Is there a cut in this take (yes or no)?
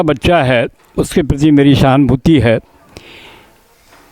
no